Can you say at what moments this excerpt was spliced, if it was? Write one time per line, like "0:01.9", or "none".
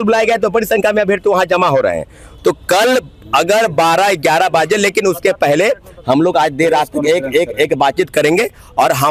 none